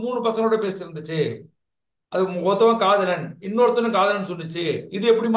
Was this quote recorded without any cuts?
yes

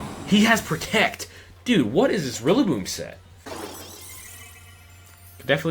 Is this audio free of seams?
no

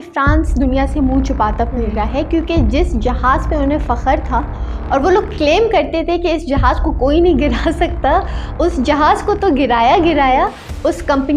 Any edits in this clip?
no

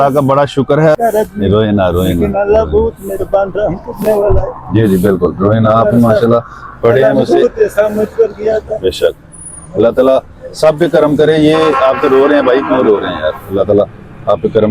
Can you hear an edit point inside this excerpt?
yes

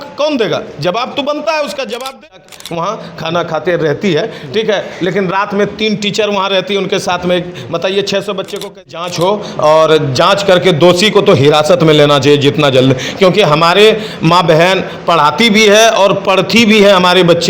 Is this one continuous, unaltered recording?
no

